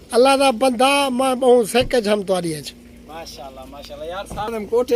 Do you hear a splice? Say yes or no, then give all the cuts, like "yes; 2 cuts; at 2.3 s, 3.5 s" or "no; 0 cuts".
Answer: no; 0 cuts